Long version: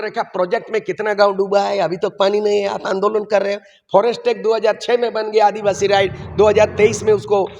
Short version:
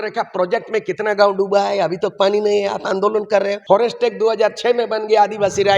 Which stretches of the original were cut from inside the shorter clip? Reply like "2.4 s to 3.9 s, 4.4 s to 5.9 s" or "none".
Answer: 3.6 s to 3.8 s

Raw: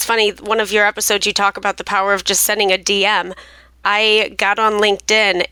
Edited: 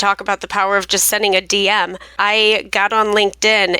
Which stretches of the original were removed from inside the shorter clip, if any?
3.4 s to 3.7 s

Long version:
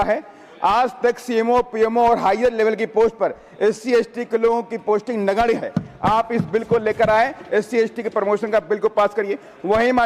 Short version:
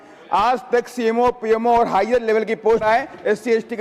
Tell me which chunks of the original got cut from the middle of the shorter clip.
3.1 s to 7.1 s

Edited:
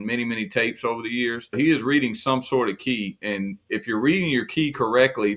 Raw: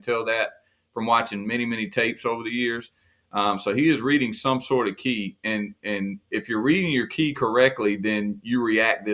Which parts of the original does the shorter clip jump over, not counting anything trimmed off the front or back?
3.0 s to 3.7 s, 5.3 s to 5.8 s

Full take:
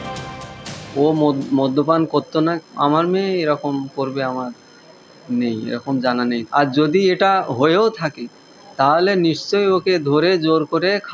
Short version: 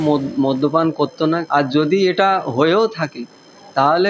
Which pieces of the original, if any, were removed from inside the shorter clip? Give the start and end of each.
2.6 s to 6.5 s

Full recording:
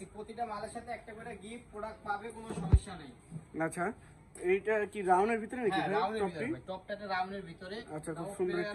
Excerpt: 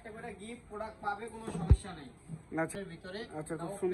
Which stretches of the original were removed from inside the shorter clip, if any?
3.7 s to 7.3 s

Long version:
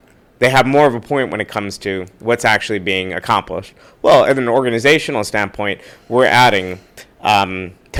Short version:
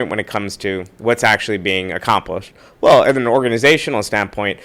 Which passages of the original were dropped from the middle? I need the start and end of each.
none

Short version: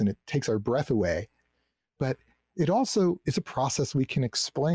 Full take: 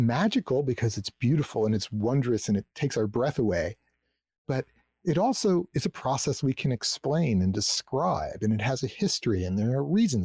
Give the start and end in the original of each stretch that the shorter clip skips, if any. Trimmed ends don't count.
none

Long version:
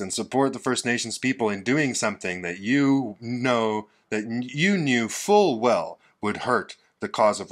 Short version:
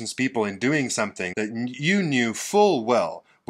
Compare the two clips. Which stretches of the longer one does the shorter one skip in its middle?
2.3 s to 4.0 s

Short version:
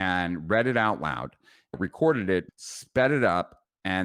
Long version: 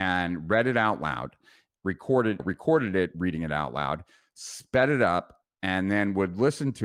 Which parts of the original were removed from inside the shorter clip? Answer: 1.7 s to 2.4 s, 3.2 s to 4.3 s

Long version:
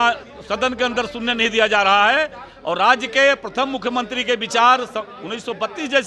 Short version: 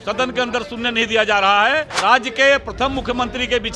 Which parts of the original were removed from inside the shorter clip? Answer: 2.4 s to 2.7 s

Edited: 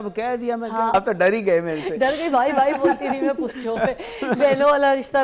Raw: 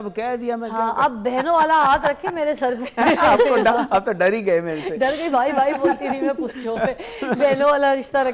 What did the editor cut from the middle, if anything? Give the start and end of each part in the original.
0.9 s to 3.9 s

